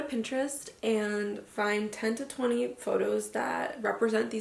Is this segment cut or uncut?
uncut